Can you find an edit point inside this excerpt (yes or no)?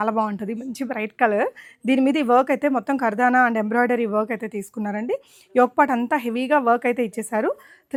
no